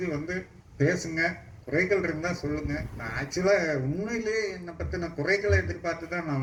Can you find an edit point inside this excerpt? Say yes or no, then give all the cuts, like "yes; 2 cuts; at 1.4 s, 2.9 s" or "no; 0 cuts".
no; 0 cuts